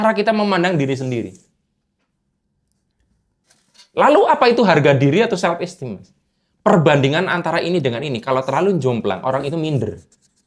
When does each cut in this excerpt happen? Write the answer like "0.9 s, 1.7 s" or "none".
none